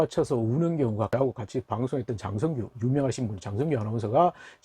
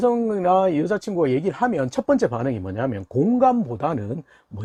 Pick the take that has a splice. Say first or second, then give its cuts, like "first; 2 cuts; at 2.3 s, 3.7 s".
first; 1 cut; at 1.1 s